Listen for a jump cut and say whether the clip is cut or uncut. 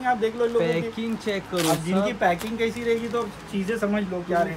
uncut